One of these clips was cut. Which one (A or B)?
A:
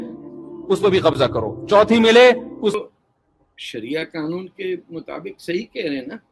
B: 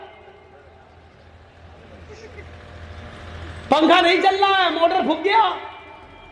A